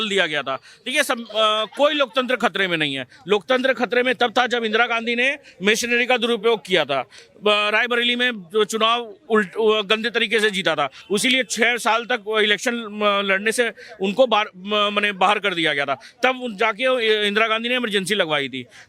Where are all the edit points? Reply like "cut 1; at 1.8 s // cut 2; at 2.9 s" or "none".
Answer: none

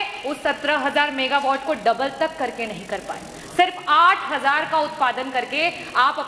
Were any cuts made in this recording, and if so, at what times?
none

